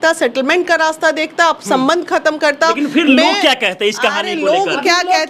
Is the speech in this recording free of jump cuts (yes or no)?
yes